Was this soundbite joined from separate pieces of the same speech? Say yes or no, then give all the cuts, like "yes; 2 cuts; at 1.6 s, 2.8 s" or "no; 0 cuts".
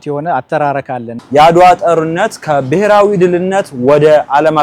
yes; 1 cut; at 1.1 s